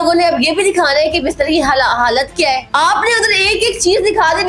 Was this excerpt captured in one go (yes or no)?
no